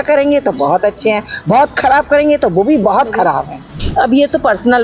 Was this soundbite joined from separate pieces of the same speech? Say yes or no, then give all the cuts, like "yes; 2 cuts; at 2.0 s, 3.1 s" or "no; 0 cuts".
yes; 1 cut; at 3.8 s